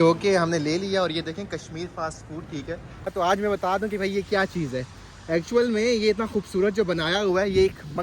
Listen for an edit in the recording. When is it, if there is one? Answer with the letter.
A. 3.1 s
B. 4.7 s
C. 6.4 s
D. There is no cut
A